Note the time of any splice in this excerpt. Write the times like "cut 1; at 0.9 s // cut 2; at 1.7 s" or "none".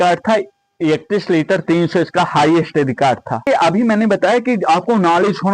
cut 1; at 3.5 s